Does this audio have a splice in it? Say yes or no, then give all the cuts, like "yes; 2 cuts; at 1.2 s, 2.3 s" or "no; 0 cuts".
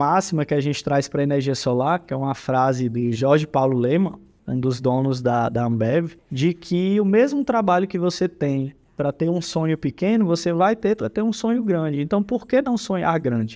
yes; 2 cuts; at 4.3 s, 6.2 s